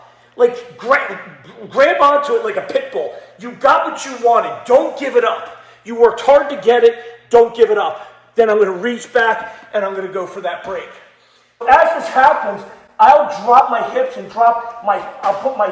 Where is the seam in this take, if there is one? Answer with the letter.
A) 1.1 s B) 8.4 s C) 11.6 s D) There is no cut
C